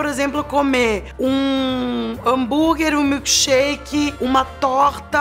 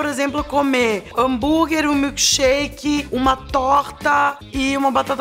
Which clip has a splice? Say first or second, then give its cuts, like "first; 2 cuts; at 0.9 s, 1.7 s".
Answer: second; 1 cut; at 1.1 s